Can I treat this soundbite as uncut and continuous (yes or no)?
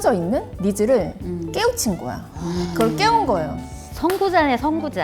yes